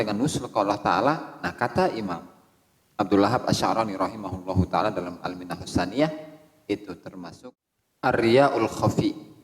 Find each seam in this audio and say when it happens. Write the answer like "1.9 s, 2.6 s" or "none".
7.3 s